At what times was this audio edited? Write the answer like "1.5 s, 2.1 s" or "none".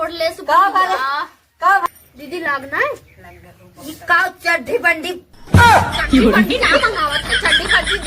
1.9 s